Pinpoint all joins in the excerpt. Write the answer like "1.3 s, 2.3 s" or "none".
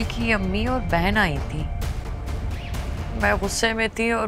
none